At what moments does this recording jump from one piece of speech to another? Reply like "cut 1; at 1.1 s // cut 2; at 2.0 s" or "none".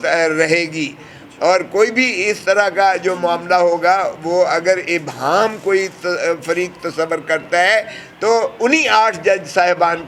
none